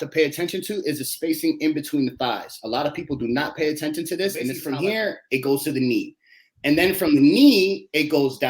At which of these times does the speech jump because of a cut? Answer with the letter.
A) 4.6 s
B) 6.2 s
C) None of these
A